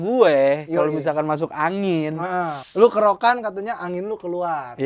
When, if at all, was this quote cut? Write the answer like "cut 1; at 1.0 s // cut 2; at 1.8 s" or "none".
cut 1; at 2.6 s

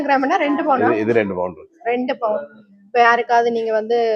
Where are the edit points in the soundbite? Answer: none

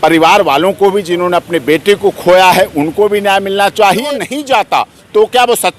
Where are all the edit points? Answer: cut 1; at 4.1 s

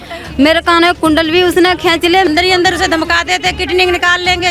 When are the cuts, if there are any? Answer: cut 1; at 2.3 s

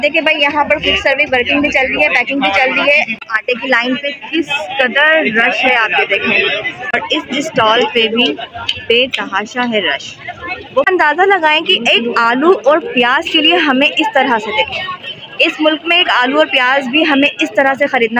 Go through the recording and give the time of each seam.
cut 1; at 3.2 s // cut 2; at 6.9 s // cut 3; at 10.9 s

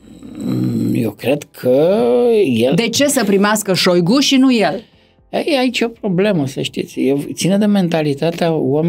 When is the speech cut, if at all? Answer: none

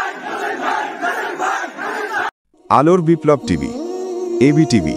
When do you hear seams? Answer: cut 1; at 2.3 s

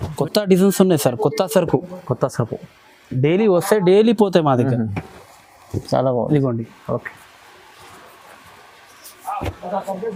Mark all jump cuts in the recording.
none

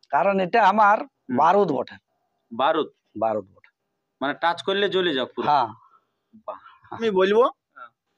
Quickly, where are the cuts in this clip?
cut 1; at 7.0 s

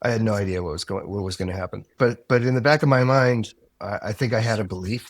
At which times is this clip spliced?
cut 1; at 1.9 s

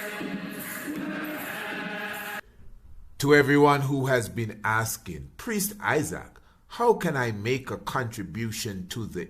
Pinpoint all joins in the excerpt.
cut 1; at 2.4 s

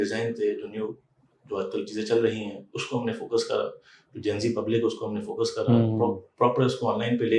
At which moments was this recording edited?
none

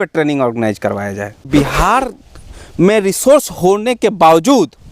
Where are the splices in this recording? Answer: cut 1; at 1.5 s

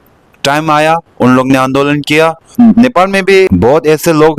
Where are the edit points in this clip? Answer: cut 1; at 2.5 s // cut 2; at 3.5 s

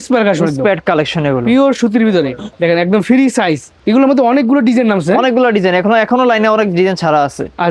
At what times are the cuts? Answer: cut 1; at 2.4 s // cut 2; at 3.7 s

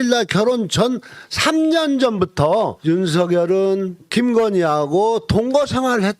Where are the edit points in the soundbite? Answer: cut 1; at 4.0 s

